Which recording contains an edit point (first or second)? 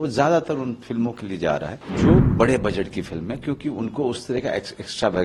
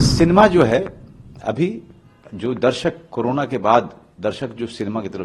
first